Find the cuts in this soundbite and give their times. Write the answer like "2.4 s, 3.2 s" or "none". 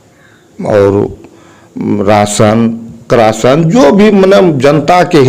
none